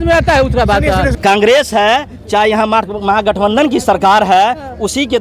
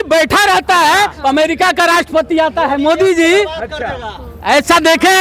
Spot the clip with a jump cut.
first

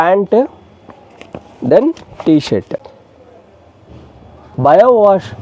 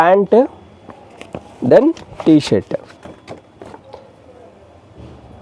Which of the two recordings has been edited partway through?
first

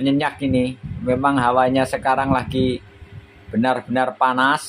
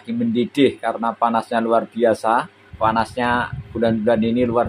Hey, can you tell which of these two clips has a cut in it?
second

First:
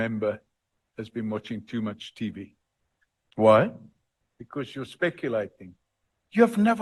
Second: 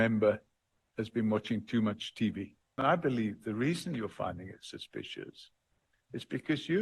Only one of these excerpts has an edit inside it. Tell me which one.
second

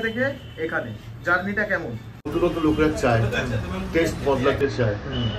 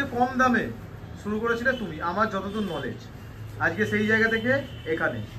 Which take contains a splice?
first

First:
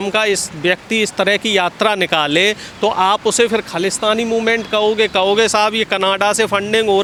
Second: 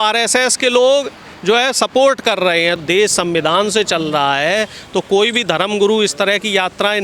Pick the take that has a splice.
second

